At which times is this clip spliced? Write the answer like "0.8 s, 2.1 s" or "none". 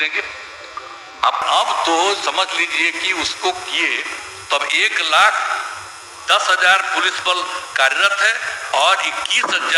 1.4 s